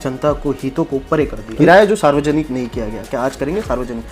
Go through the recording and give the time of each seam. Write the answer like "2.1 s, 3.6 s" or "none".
1.4 s